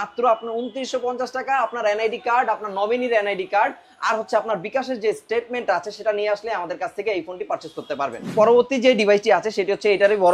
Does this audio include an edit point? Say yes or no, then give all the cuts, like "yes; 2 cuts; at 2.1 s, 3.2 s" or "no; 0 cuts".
yes; 1 cut; at 8.3 s